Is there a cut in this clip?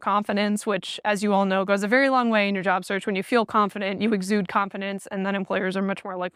no; 0 cuts

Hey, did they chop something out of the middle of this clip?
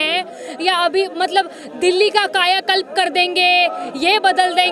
no; 0 cuts

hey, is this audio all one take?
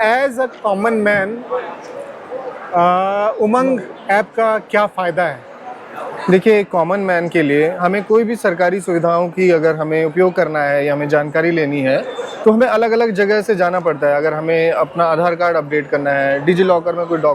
yes; 0 cuts

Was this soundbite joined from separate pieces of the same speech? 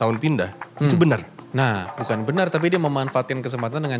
yes; 1 cut; at 1.4 s

